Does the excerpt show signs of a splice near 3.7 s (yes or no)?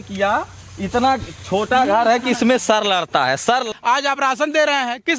yes